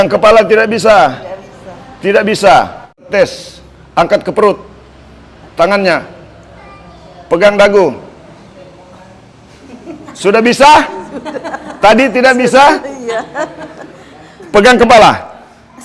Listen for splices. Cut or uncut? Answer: cut